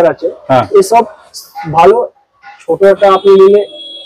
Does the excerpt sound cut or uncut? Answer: uncut